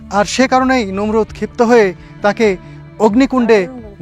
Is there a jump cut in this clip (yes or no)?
no